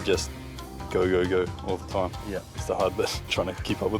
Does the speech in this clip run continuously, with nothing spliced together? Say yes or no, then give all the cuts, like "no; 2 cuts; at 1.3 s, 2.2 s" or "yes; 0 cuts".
no; 1 cut; at 2.5 s